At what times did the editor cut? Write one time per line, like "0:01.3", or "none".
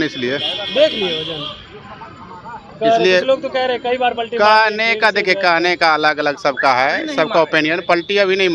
none